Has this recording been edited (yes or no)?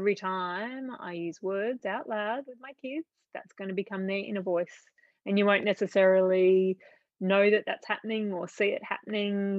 no